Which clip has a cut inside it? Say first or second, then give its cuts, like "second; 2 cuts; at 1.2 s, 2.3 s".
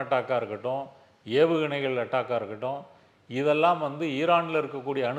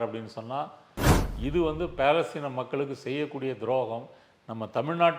second; 1 cut; at 1.0 s